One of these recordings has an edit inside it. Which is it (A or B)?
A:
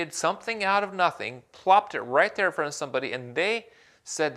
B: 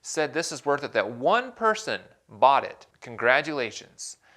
B